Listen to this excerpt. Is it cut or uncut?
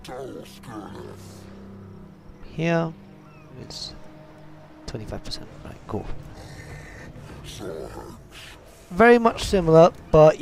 uncut